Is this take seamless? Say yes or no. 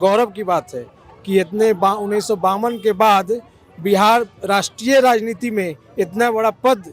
yes